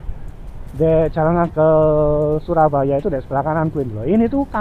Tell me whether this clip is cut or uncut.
uncut